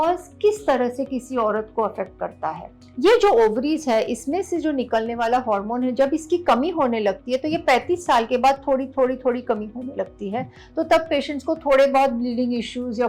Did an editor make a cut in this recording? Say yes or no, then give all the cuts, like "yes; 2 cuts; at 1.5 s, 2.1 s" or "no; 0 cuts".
no; 0 cuts